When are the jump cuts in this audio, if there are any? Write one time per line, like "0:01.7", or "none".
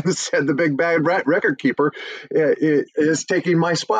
none